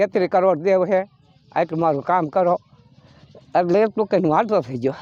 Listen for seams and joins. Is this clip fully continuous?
yes; 0 cuts

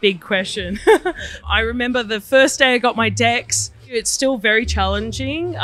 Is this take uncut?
no; 2 cuts; at 1.4 s, 3.8 s

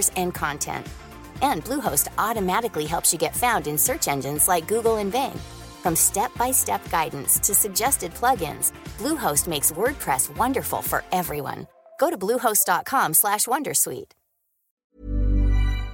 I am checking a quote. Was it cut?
yes; 1 cut; at 14.9 s

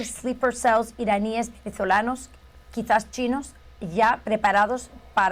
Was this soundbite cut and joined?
no; 0 cuts

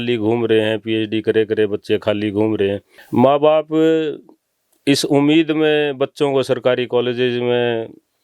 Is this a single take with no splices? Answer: no; 1 cut; at 2.9 s

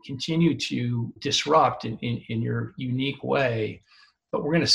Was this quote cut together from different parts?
yes; 1 cut; at 1.2 s

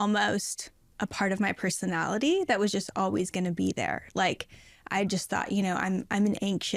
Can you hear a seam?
no; 0 cuts

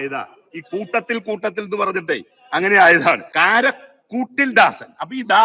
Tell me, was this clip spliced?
yes; 1 cut; at 3.3 s

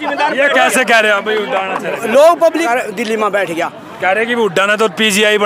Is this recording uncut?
no; 1 cut; at 2.7 s

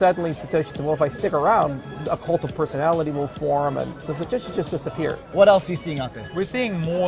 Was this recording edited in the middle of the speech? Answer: yes; 3 cuts; at 4.0 s, 5.2 s, 6.2 s

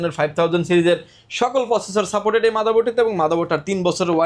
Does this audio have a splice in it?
no; 0 cuts

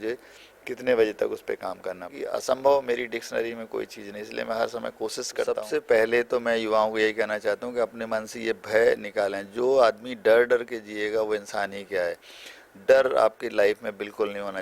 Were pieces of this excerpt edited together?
yes; 2 cuts; at 2.4 s, 5.3 s

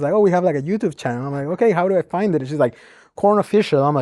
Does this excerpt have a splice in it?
no; 0 cuts

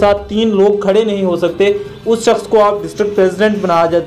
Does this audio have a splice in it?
no; 0 cuts

